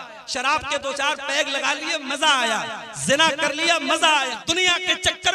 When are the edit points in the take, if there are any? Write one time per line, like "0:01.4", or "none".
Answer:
0:04.3